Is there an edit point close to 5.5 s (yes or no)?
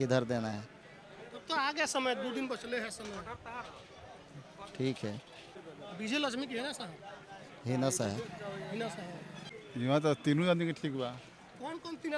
yes